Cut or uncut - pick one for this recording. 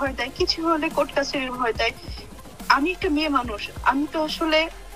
uncut